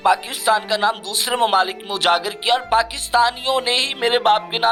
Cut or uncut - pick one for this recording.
uncut